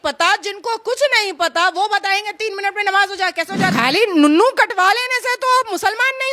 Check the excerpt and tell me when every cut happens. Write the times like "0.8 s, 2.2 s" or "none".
3.7 s

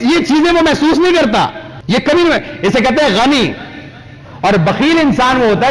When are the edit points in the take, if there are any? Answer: 1.7 s

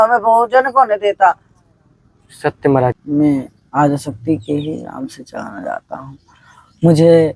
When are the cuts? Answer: 3.0 s

